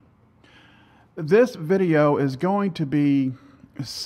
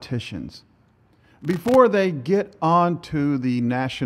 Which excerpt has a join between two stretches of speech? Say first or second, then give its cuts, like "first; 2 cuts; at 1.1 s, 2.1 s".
second; 1 cut; at 1.2 s